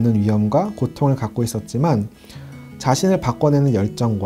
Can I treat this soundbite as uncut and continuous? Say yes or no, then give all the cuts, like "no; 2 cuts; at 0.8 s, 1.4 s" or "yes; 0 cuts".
yes; 0 cuts